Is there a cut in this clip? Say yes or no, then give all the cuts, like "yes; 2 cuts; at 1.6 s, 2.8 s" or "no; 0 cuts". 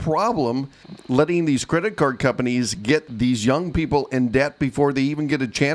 no; 0 cuts